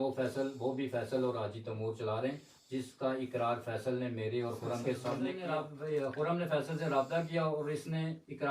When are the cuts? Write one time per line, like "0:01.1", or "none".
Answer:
0:05.4